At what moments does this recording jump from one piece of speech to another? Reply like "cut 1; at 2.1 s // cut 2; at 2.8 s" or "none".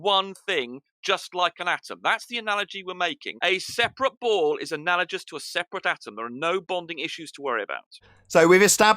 cut 1; at 3.3 s // cut 2; at 7.9 s

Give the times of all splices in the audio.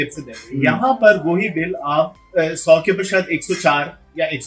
cut 1; at 2.2 s

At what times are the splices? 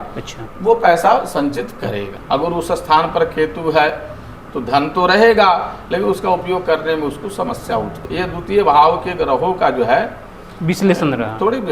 cut 1; at 2.1 s // cut 2; at 8.1 s

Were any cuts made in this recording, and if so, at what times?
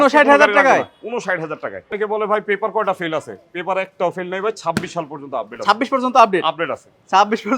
cut 1; at 1.9 s

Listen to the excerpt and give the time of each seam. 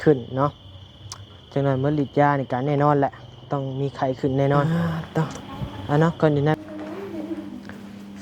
cut 1; at 6.6 s

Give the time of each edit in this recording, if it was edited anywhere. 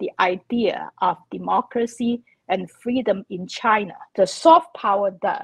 cut 1; at 4.1 s

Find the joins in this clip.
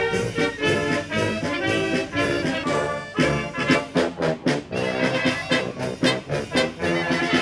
cut 1; at 5.2 s

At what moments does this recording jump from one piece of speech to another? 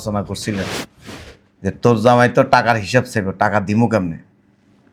none

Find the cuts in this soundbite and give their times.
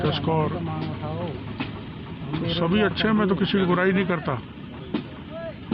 none

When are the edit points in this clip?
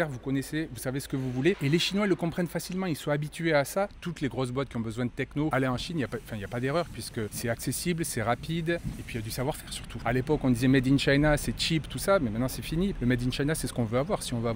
cut 1; at 1.6 s // cut 2; at 3.9 s // cut 3; at 5.5 s // cut 4; at 10.0 s // cut 5; at 13.0 s

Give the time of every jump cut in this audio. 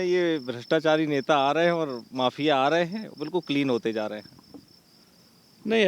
none

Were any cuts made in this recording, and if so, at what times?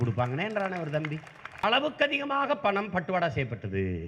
cut 1; at 1.6 s

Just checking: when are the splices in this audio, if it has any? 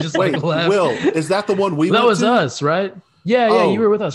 none

